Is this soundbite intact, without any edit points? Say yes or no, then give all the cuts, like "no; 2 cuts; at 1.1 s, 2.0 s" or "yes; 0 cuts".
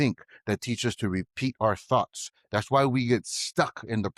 yes; 0 cuts